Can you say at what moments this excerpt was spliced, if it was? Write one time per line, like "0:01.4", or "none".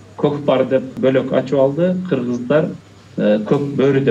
none